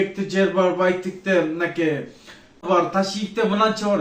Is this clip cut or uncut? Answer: cut